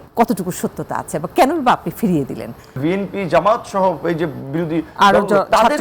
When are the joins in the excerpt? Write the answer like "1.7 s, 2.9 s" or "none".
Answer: 2.8 s